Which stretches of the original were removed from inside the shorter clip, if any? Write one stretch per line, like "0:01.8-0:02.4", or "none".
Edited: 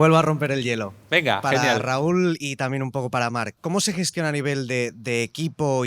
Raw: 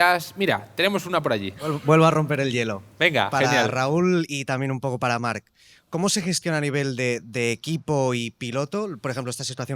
0:05.4-0:05.8